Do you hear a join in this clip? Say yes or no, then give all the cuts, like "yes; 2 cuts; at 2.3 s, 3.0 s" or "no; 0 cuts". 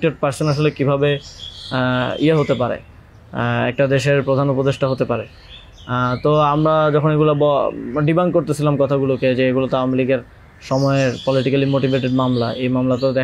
no; 0 cuts